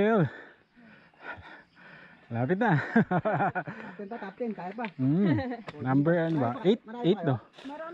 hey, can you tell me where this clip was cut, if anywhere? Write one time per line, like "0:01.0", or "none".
none